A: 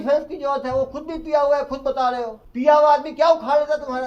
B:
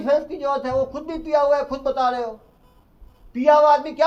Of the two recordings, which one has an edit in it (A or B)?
A